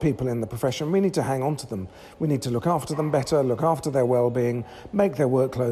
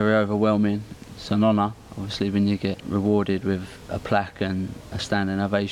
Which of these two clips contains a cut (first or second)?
second